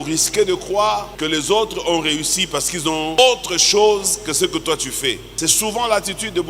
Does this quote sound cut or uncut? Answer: cut